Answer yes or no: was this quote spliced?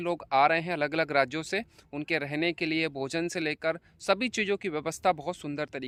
no